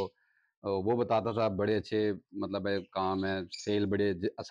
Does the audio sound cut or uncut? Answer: uncut